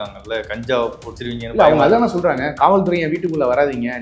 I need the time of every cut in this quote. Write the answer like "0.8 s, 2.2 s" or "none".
1.1 s